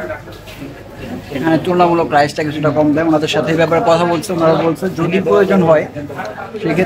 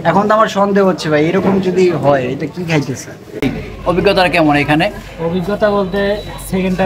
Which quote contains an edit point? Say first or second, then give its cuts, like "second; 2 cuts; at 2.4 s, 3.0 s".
second; 1 cut; at 3.4 s